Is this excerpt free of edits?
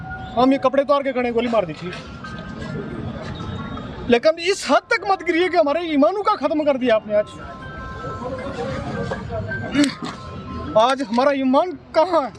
yes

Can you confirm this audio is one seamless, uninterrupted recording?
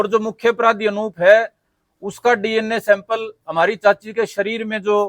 yes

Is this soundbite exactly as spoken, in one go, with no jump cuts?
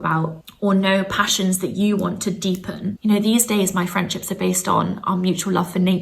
no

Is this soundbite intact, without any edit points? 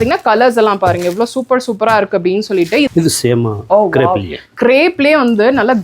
no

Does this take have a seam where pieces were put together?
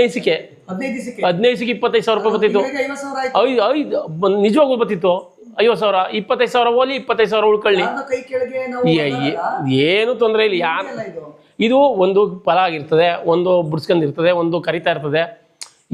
no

